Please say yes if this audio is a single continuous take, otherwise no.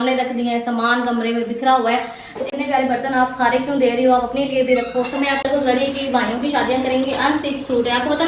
no